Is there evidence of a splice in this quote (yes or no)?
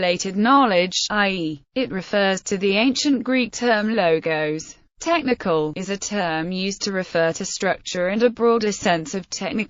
yes